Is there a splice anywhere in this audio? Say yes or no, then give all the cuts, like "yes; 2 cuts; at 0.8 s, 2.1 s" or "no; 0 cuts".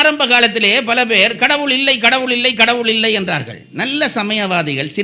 no; 0 cuts